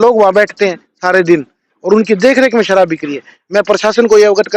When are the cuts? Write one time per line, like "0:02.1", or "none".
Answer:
none